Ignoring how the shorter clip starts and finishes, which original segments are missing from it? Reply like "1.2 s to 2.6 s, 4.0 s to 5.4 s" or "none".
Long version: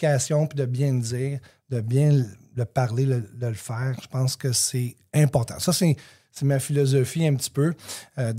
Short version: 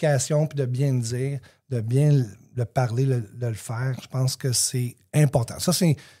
none

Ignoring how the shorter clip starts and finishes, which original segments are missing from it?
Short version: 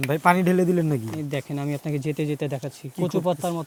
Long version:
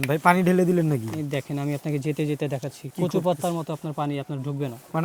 none

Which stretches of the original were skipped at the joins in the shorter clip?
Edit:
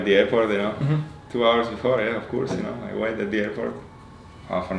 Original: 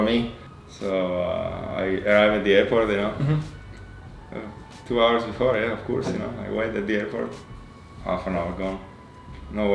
3.6 s to 4.7 s

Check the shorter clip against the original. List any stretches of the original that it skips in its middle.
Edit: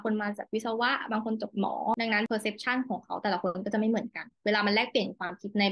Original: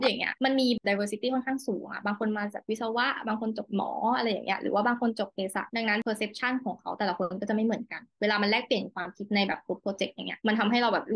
4.1 s to 5.7 s

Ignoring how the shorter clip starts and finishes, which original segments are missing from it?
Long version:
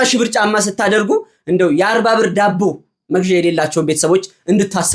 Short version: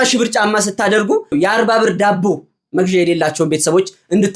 1.3 s to 1.7 s

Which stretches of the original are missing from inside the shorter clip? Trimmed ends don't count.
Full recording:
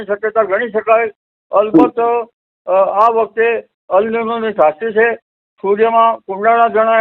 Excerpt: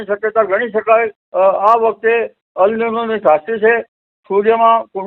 1.2 s to 2.5 s

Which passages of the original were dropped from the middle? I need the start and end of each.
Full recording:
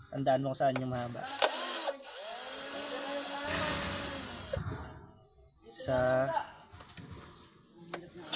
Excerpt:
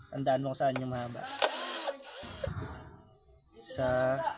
2.2 s to 4.3 s

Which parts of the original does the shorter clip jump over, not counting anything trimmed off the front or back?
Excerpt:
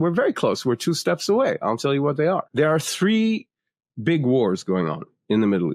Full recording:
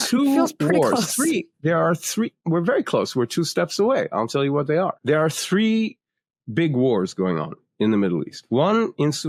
none

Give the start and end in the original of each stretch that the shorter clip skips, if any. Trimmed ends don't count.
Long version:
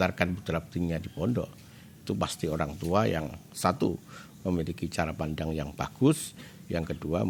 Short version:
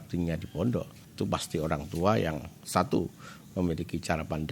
1.6 s to 1.9 s

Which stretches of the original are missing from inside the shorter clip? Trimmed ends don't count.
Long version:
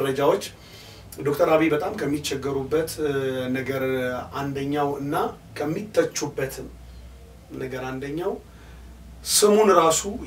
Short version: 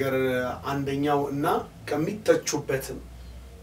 none

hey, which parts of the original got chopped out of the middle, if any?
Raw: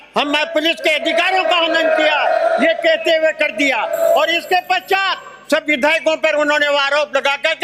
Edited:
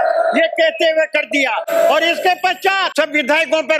5.1 s to 5.4 s

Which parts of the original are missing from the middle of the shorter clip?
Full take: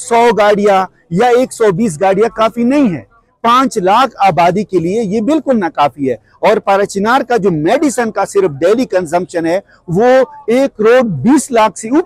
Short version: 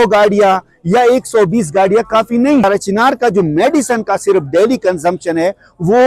2.9 s to 6.7 s

